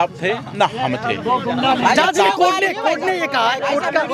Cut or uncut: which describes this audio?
uncut